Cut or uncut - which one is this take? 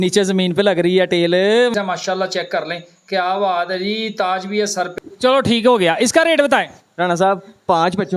cut